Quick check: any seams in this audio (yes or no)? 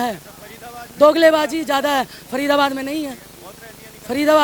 no